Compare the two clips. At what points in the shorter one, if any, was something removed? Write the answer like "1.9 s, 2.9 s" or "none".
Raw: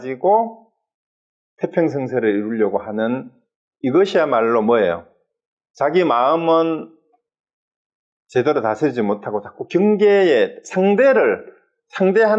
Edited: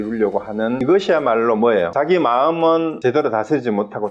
0.8 s, 1.9 s, 3.0 s